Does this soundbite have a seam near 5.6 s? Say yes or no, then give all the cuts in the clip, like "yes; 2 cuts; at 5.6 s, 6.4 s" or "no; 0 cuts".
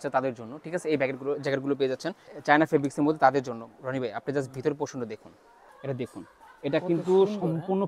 yes; 2 cuts; at 2.3 s, 5.6 s